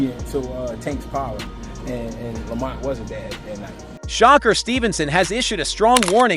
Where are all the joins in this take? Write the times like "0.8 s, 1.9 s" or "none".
4.0 s